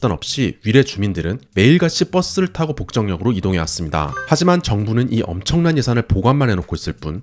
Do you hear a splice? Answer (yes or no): yes